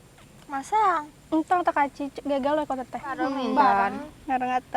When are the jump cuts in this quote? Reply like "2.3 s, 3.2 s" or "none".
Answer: 3.3 s